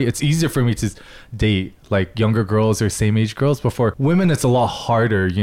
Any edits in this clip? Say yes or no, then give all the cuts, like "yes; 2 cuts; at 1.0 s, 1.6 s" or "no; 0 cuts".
yes; 1 cut; at 4.0 s